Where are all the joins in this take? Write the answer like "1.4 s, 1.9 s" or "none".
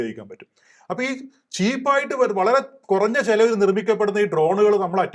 none